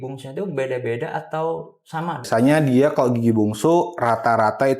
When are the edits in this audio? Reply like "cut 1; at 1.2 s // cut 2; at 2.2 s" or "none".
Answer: cut 1; at 2.3 s